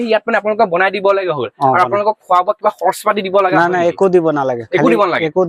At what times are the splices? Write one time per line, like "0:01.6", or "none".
none